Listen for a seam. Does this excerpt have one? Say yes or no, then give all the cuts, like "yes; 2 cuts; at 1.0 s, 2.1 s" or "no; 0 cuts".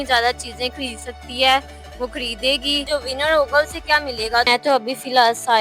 yes; 2 cuts; at 2.8 s, 4.5 s